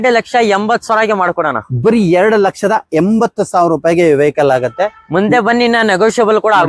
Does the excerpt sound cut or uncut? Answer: uncut